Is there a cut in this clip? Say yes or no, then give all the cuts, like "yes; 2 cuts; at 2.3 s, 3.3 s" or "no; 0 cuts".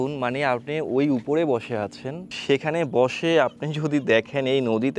yes; 1 cut; at 2.4 s